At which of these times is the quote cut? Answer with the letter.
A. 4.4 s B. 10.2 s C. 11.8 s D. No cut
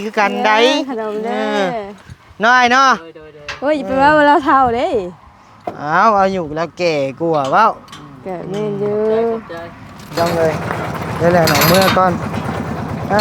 B